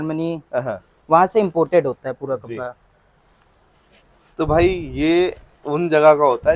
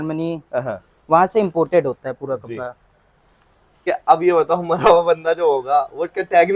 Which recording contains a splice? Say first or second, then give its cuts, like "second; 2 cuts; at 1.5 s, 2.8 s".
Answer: second; 1 cut; at 3.9 s